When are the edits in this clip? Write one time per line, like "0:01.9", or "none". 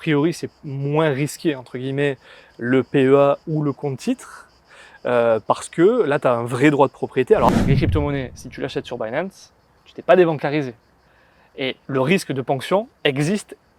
0:07.5